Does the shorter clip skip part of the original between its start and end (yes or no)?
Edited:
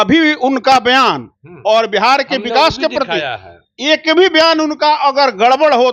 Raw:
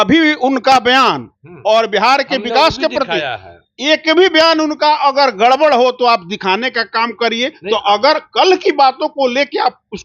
no